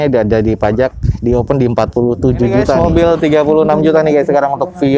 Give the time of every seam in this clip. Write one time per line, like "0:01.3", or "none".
0:02.8